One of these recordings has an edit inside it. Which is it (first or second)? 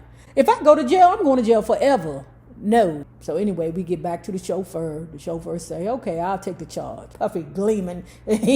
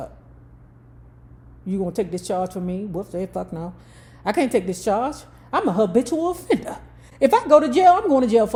first